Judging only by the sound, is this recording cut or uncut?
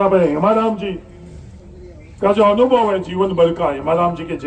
uncut